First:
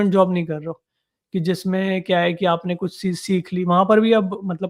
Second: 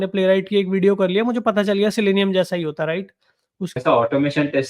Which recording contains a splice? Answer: second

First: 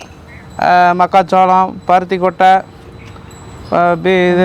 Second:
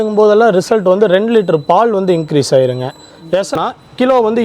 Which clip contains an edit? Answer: second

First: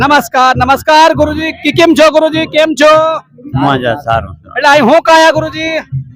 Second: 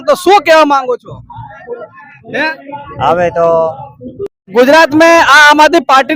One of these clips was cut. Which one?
second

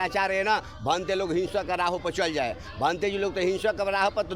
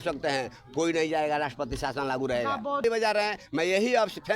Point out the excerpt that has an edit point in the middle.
second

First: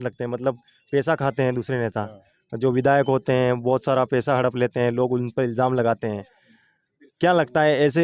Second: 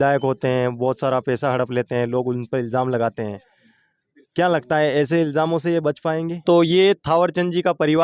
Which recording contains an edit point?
second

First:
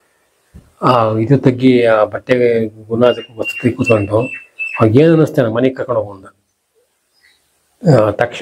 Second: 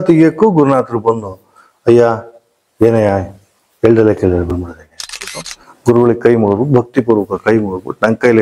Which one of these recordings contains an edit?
second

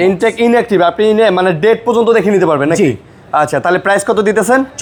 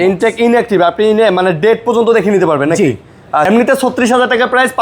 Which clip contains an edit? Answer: second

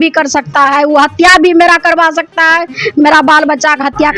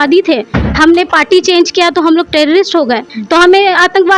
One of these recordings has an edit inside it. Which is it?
second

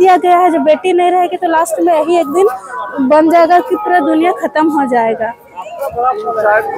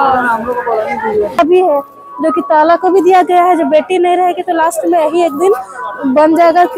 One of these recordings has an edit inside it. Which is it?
second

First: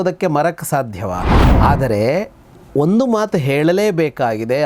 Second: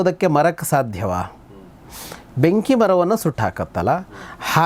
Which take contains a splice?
first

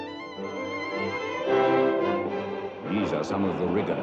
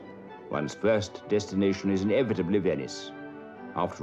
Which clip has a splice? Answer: second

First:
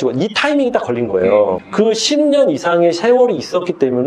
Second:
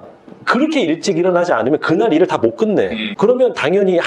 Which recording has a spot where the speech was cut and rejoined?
first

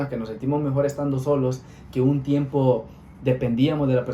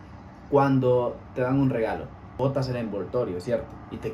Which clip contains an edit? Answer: second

